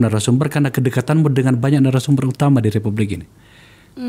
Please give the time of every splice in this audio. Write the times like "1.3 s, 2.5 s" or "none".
none

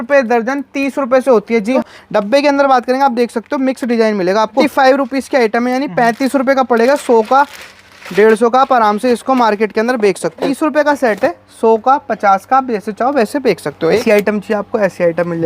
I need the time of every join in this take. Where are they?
1.8 s, 4.6 s, 10.5 s, 14.0 s

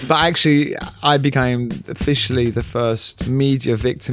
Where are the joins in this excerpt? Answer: 3.1 s

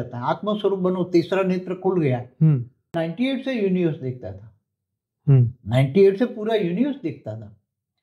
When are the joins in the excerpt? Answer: 3.0 s

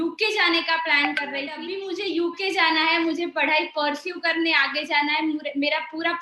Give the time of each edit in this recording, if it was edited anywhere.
1.7 s

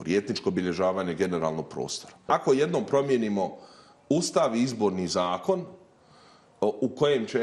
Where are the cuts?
2.2 s

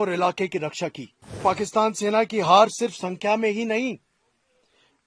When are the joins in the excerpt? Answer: 1.4 s

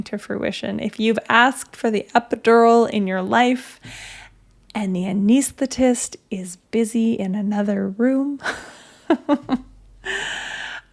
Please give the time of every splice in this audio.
none

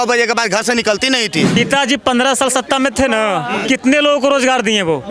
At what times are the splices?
1.6 s

